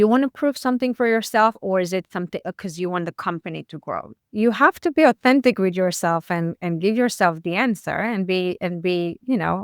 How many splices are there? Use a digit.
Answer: 1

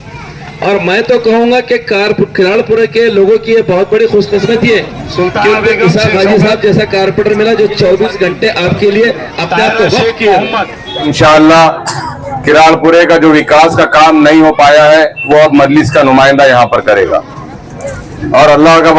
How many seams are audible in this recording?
1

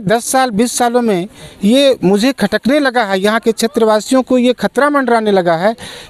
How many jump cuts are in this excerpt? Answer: 0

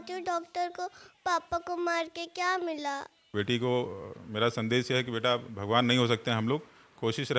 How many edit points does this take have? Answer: 1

